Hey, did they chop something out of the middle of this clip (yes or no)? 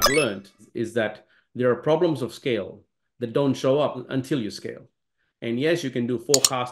yes